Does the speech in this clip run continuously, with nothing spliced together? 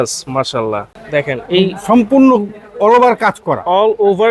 no; 1 cut; at 1.0 s

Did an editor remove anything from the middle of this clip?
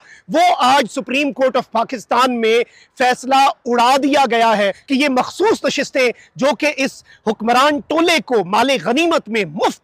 yes; 1 cut; at 4.8 s

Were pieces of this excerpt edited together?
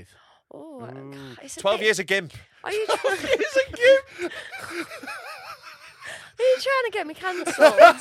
no; 0 cuts

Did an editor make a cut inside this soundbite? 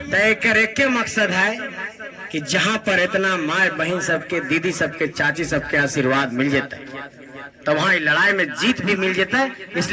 no; 0 cuts

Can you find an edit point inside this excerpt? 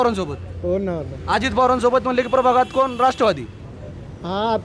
no; 0 cuts

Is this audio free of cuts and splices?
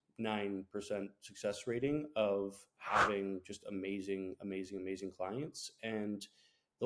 yes; 0 cuts

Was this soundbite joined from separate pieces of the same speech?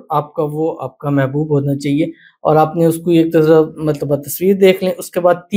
no; 0 cuts

